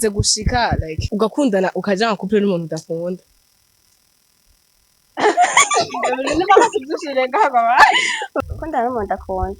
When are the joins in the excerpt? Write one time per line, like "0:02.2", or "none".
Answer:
0:01.0
0:08.2